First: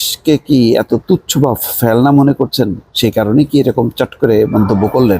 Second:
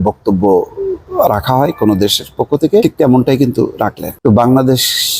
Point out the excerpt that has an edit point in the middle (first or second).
second